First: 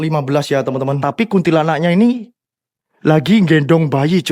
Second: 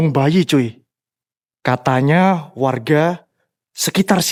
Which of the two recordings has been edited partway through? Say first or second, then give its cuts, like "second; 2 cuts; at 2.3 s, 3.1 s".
first; 1 cut; at 1.0 s